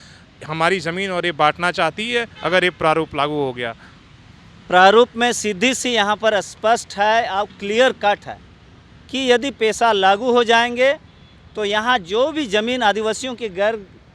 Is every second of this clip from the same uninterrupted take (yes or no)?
yes